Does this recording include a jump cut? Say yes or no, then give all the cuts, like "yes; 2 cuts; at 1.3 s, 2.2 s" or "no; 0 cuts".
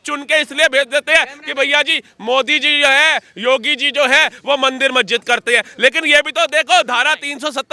no; 0 cuts